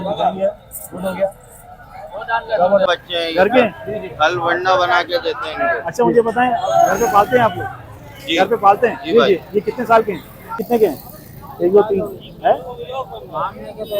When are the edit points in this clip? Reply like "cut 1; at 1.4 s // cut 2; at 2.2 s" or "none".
cut 1; at 2.9 s // cut 2; at 10.6 s